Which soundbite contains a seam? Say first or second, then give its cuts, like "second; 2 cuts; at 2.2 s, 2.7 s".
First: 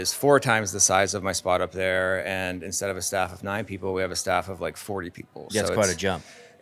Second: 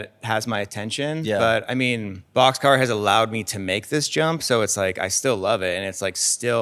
second; 1 cut; at 2.2 s